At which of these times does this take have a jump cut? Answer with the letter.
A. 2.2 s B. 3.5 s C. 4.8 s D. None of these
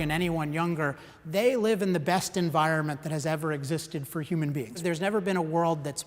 C